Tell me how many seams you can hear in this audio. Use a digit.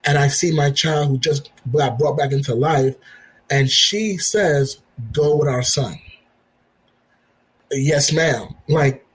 1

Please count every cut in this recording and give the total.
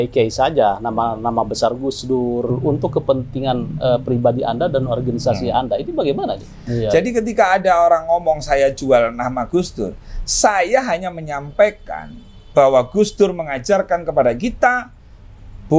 2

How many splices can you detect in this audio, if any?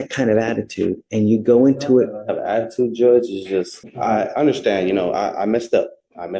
1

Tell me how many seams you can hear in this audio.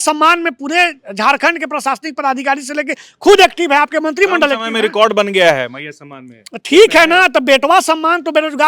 0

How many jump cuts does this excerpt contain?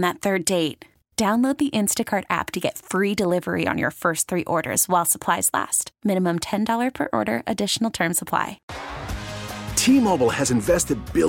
1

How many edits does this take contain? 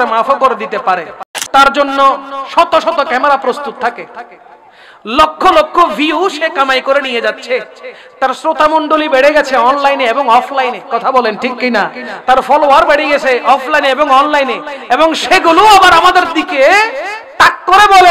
1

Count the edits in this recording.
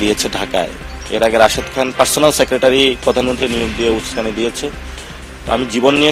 0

